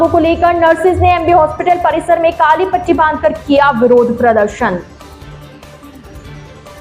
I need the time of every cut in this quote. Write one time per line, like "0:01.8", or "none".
none

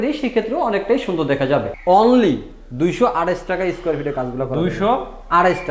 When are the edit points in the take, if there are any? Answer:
0:01.7

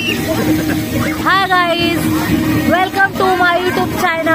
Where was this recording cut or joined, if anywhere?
0:01.2

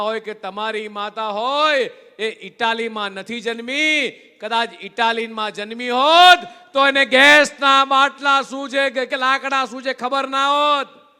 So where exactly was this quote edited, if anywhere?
none

